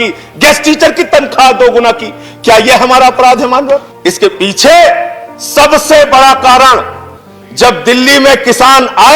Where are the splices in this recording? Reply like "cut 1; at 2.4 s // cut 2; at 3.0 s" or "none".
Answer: cut 1; at 3.9 s